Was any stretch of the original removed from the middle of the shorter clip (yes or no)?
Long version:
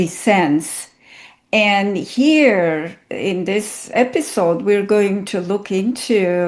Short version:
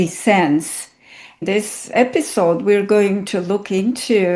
yes